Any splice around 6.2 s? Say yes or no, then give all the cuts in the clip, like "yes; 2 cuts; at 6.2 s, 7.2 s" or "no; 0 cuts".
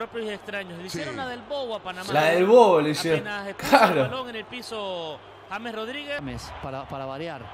yes; 1 cut; at 6.2 s